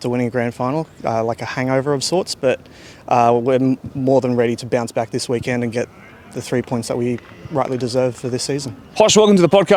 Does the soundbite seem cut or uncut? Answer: uncut